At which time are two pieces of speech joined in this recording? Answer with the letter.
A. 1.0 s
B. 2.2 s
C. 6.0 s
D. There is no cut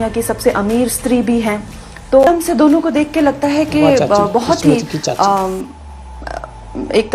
B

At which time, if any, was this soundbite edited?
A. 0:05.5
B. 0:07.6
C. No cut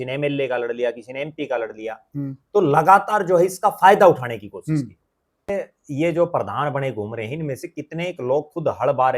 A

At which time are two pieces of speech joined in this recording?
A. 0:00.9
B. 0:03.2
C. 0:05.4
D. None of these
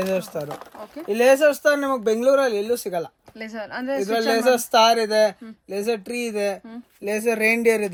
D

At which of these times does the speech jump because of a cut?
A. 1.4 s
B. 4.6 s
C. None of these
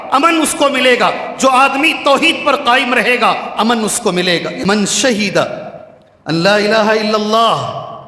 B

